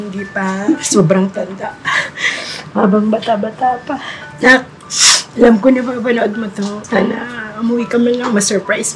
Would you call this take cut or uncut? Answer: cut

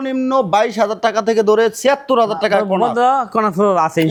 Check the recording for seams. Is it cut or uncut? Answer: uncut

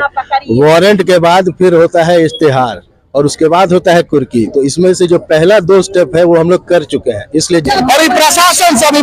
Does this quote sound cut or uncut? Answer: cut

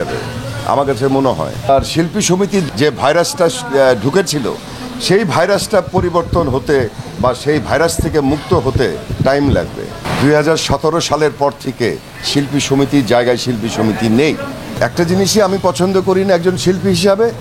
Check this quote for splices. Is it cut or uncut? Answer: cut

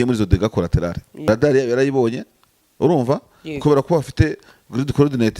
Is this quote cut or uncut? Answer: cut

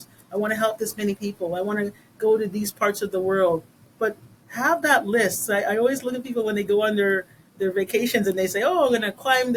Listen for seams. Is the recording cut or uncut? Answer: uncut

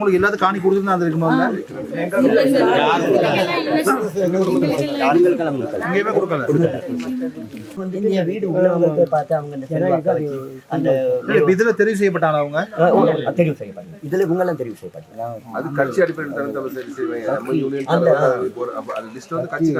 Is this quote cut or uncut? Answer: uncut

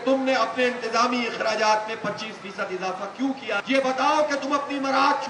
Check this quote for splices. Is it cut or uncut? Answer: cut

